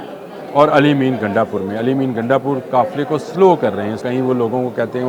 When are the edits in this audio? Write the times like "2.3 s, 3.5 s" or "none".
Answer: 4.0 s